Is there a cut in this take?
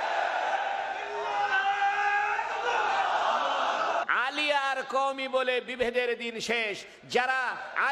yes; 1 cut; at 4.1 s

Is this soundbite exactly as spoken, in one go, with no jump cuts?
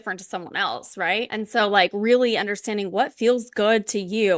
no; 1 cut; at 1.3 s

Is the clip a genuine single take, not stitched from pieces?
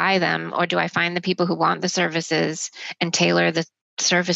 yes; 0 cuts

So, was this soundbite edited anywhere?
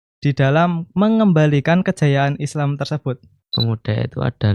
yes; 1 cut; at 3.5 s

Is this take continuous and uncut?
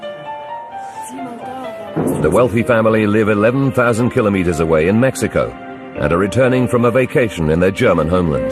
yes; 0 cuts

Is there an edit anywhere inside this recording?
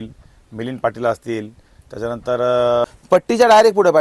yes; 1 cut; at 2.8 s

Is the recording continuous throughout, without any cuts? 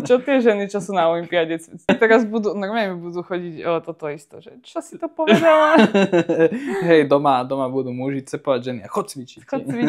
no; 1 cut; at 1.9 s

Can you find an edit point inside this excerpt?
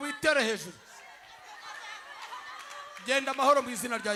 no; 0 cuts

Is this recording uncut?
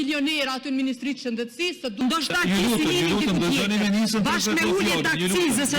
no; 1 cut; at 2.0 s

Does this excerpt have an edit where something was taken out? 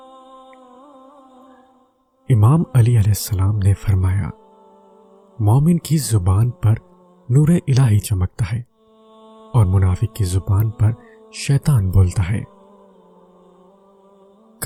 no; 0 cuts

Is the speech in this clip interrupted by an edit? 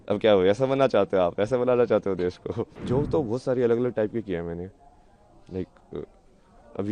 yes; 1 cut; at 2.7 s

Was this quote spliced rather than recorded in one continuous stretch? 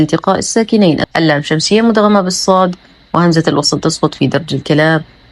yes; 1 cut; at 1.1 s

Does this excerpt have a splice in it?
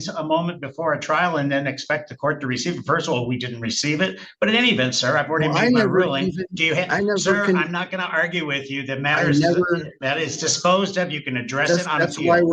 no; 0 cuts

